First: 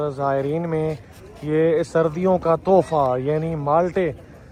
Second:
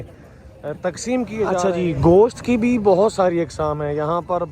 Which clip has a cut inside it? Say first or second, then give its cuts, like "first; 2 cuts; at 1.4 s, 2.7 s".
second; 1 cut; at 1.6 s